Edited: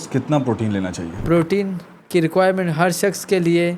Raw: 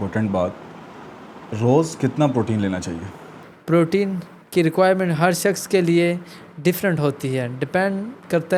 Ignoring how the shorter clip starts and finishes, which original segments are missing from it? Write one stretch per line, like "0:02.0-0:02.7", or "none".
0:03.0-0:03.5